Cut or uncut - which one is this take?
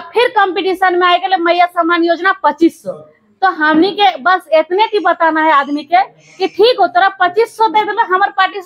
uncut